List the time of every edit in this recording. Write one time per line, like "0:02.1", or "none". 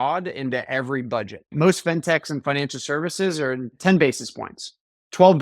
0:01.5
0:03.7